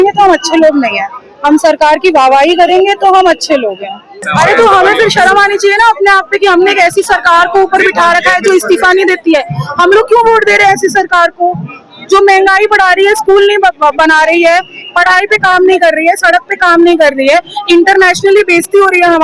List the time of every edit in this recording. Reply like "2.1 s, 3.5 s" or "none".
4.2 s